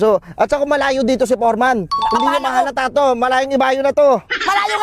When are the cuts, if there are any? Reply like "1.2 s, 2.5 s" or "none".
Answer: none